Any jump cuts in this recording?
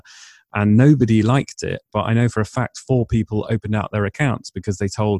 no; 0 cuts

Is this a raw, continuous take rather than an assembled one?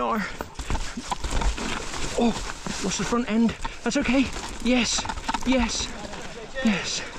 yes; 0 cuts

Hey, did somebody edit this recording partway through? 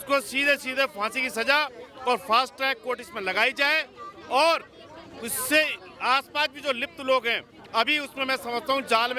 no; 0 cuts

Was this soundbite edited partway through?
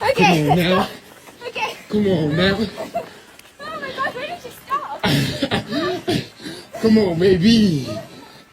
yes; 1 cut; at 6.3 s

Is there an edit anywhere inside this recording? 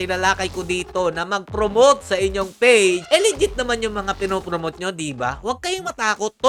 no; 0 cuts

